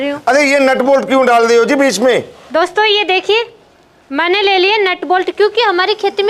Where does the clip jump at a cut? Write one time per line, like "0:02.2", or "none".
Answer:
none